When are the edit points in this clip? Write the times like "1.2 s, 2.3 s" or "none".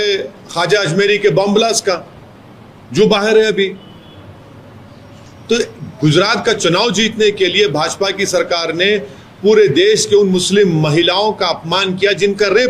none